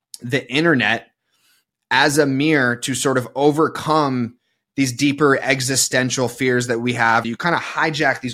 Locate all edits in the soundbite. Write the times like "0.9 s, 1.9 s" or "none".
7.2 s